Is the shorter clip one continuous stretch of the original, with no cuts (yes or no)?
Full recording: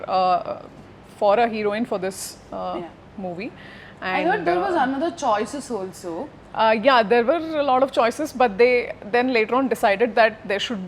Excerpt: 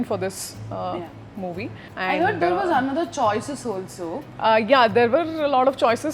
no